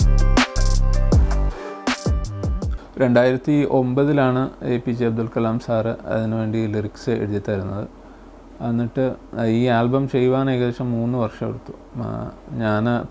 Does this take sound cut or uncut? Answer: cut